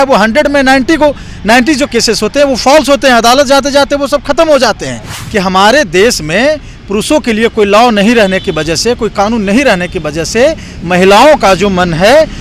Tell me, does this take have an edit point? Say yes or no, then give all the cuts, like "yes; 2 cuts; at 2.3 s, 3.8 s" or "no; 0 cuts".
yes; 1 cut; at 5.2 s